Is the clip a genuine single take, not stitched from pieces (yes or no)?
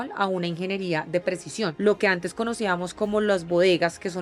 no